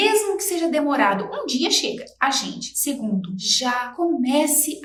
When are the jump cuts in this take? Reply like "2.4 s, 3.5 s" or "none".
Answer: none